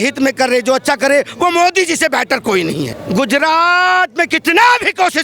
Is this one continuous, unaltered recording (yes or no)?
no